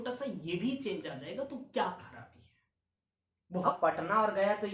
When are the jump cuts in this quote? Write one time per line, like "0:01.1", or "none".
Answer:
0:03.6